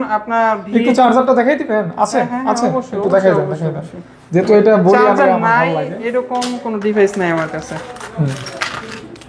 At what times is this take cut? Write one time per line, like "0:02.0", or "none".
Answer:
none